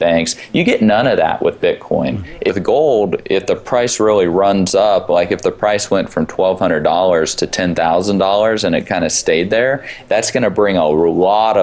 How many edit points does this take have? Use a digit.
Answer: 1